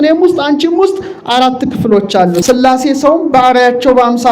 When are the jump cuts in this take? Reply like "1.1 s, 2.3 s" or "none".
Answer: 2.4 s